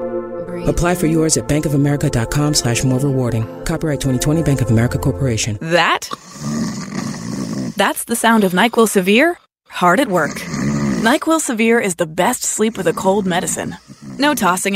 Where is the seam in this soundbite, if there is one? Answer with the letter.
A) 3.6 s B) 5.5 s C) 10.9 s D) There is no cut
B